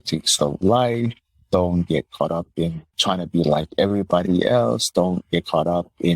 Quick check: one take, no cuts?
no; 1 cut; at 3.0 s

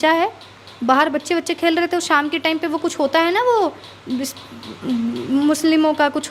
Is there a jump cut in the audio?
no; 0 cuts

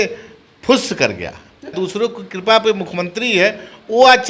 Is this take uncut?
no; 1 cut; at 1.7 s

